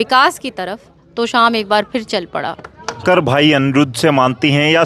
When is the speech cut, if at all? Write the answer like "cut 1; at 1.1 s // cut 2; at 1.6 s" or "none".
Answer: cut 1; at 3.0 s